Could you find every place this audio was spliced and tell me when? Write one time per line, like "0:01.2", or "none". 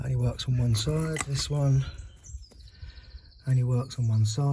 0:01.2